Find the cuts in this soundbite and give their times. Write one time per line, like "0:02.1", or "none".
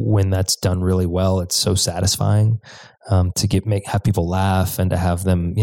none